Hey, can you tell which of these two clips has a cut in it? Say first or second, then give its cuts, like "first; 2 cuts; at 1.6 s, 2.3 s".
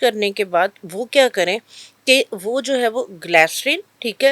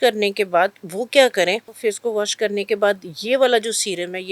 second; 1 cut; at 1.7 s